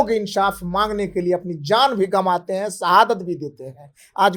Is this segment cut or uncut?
uncut